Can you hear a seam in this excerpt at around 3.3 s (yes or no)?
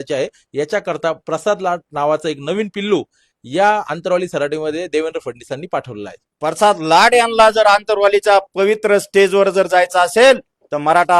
no